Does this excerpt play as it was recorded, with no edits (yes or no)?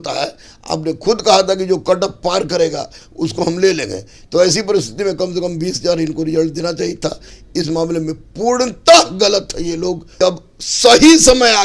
no